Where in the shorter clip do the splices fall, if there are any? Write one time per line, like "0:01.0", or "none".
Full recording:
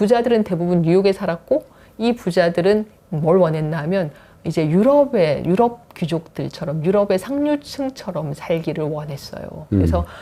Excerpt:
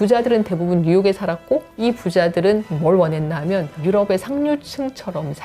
0:01.7
0:02.7
0:03.7